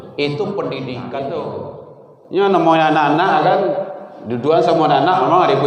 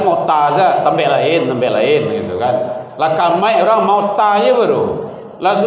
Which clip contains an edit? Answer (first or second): first